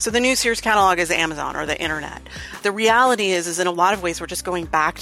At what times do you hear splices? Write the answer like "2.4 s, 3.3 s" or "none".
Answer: 2.6 s